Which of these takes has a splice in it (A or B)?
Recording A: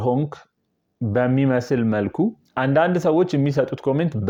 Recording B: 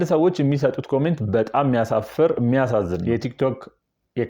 B